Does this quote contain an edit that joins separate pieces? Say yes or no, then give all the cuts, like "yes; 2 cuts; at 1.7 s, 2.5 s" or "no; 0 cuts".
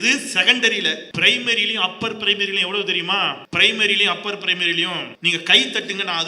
yes; 3 cuts; at 1.1 s, 3.4 s, 5.1 s